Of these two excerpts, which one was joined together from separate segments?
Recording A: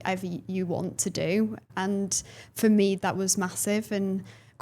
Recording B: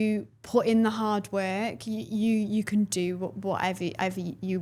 A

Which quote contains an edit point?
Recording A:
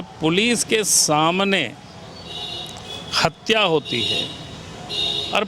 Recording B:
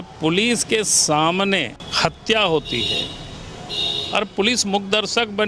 B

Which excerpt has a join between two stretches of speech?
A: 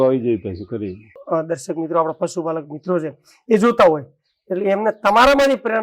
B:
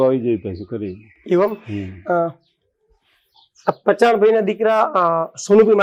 A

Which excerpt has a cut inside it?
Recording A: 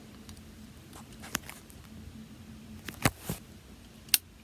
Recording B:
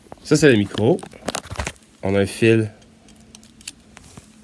A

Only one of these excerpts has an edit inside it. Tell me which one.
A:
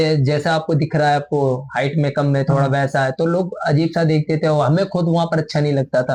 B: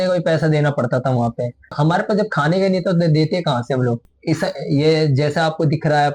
B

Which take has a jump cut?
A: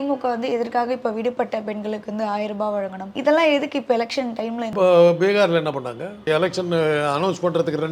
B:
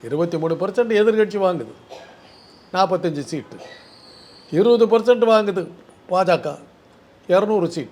A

